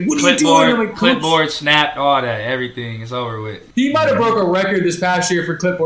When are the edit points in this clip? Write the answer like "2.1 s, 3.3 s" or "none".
3.6 s